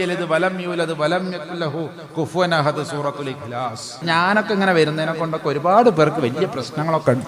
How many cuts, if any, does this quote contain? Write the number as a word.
one